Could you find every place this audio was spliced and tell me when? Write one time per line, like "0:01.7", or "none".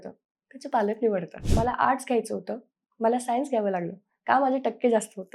0:01.4